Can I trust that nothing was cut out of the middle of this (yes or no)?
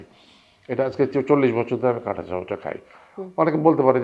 yes